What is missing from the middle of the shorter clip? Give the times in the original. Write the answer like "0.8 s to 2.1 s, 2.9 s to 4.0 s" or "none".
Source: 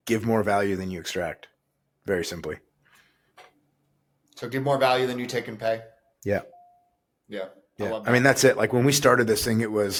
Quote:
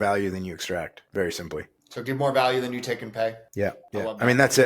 1.4 s to 1.9 s, 2.7 s to 4.2 s, 6.1 s to 7.5 s